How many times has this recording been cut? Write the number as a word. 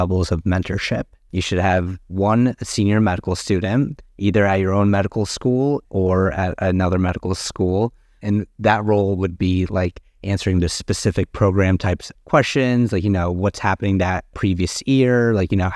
four